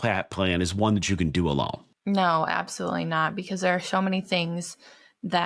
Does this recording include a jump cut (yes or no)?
yes